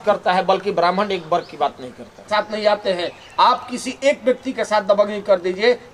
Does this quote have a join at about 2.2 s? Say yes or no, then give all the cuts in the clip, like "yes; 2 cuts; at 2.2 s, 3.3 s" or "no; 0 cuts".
yes; 1 cut; at 2.2 s